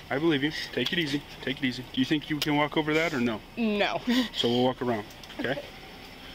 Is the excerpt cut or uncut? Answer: uncut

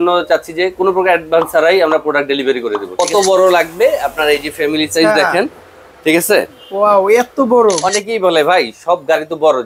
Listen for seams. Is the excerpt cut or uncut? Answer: cut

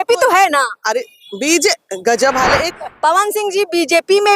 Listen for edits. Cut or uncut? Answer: cut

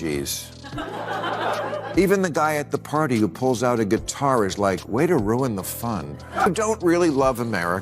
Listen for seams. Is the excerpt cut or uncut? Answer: cut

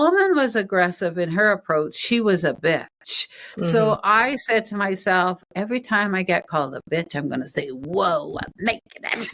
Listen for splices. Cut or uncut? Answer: uncut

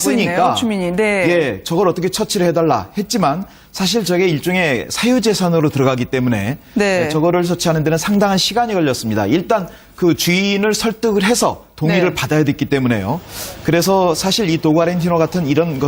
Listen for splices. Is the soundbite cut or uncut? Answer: cut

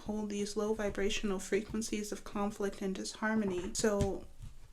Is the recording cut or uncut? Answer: cut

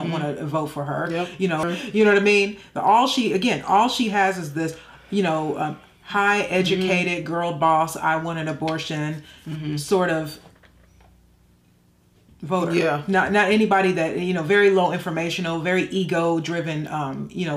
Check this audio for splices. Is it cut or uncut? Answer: cut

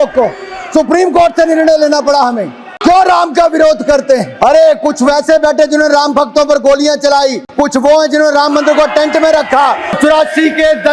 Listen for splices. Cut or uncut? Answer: cut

